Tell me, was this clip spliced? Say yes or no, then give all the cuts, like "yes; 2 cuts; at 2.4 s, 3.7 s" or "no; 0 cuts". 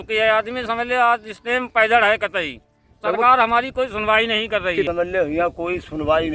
yes; 1 cut; at 4.9 s